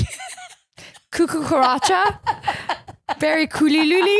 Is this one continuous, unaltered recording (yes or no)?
yes